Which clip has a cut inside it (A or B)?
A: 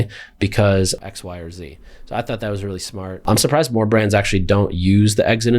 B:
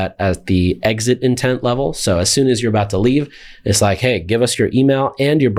A